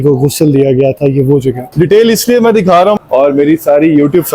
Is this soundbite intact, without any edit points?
no; 2 cuts; at 1.6 s, 3.0 s

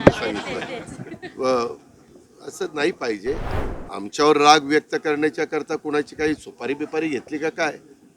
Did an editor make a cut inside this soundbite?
yes; 1 cut; at 3.5 s

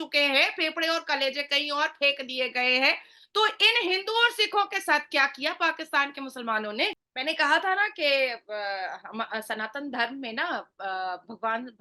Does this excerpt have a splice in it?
yes; 1 cut; at 7.1 s

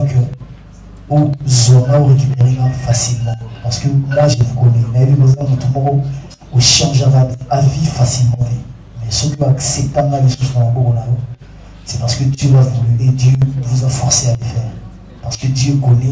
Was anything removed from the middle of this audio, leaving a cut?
no; 0 cuts

